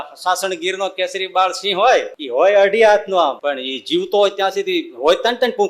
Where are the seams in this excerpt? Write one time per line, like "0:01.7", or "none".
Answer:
0:02.2
0:03.4